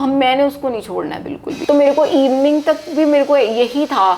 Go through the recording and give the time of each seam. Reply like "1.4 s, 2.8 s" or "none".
1.5 s